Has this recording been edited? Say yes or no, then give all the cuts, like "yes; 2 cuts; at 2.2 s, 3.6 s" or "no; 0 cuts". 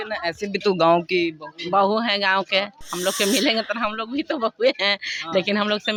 no; 0 cuts